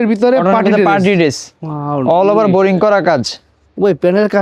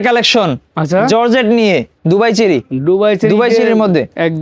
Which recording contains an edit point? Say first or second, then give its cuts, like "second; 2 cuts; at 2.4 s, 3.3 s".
second; 1 cut; at 1.9 s